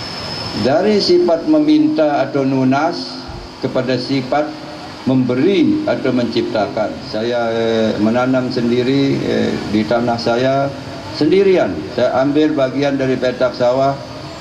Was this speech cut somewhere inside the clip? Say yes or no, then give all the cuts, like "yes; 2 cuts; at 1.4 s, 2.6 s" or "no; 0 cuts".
yes; 1 cut; at 7.0 s